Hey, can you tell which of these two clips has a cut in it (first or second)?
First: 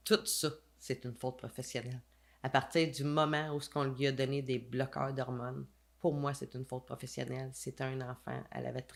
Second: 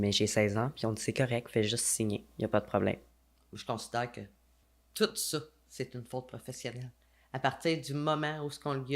second